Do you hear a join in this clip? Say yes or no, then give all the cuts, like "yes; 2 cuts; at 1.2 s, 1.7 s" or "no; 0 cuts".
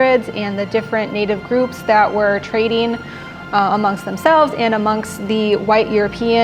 no; 0 cuts